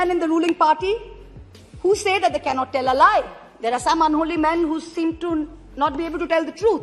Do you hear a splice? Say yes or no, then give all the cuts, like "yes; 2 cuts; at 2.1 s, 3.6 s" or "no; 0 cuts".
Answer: no; 0 cuts